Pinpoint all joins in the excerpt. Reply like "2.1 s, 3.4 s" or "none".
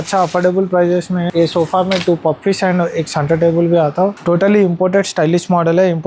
1.2 s, 4.2 s